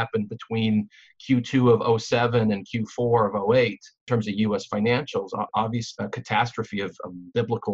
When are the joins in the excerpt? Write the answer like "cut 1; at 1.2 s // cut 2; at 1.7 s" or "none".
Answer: cut 1; at 4.0 s // cut 2; at 5.5 s